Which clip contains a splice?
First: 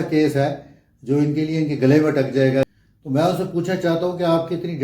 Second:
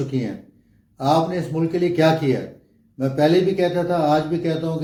first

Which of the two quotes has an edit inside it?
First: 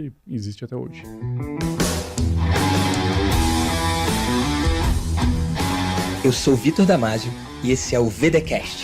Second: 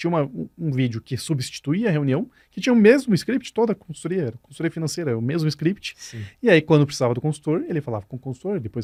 first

